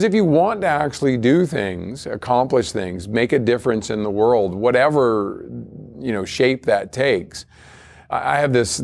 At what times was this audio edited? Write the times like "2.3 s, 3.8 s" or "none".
none